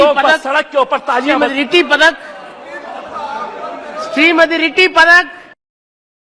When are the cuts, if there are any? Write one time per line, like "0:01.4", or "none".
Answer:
none